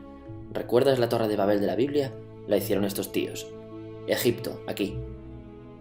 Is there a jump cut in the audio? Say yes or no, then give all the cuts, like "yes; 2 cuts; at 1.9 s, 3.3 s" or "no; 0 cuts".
no; 0 cuts